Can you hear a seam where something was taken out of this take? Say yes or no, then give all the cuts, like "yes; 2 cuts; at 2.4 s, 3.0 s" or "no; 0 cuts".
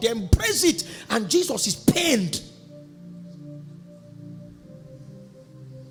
no; 0 cuts